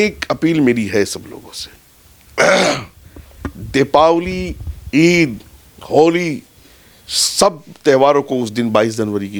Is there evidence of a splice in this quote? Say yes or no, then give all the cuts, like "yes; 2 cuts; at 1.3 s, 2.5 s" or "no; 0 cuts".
no; 0 cuts